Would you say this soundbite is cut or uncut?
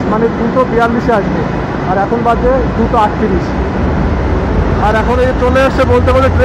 uncut